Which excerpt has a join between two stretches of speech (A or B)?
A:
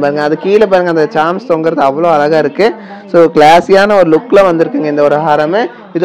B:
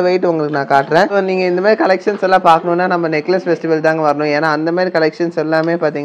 B